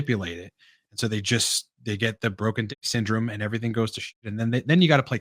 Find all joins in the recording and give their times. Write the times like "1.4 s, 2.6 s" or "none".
none